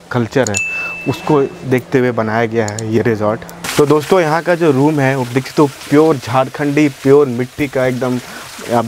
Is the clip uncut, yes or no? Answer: no